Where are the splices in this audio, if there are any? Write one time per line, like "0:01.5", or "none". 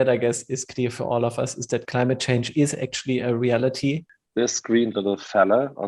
0:04.0